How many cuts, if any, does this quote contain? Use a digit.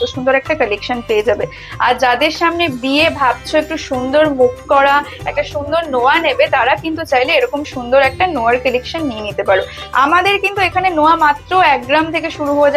0